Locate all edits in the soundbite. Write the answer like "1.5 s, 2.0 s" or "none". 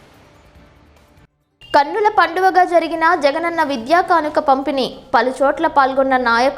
1.1 s

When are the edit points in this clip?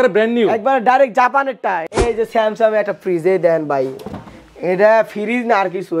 2.0 s

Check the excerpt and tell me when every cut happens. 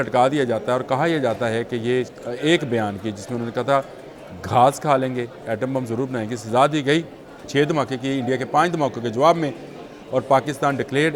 2.1 s, 7.4 s

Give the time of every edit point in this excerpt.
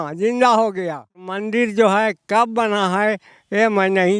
1.4 s

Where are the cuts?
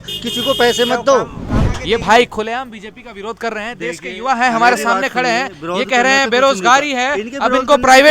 1.7 s

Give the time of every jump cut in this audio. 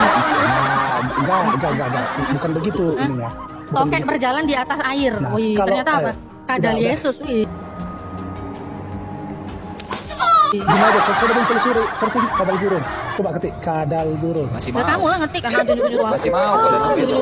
none

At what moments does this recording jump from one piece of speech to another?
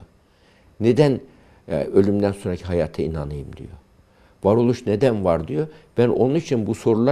none

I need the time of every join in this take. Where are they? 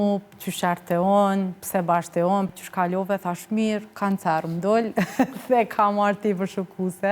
2.5 s

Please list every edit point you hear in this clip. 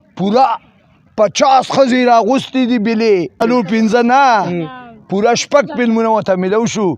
3.4 s

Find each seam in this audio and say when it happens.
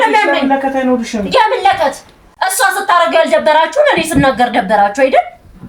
none

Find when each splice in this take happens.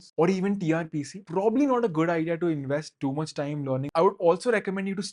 1.2 s, 3.9 s

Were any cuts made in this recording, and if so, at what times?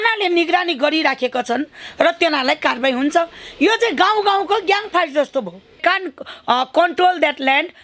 5.8 s

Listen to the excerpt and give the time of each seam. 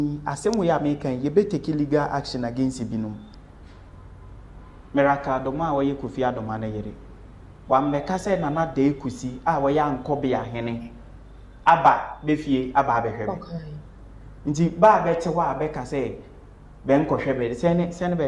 3.3 s

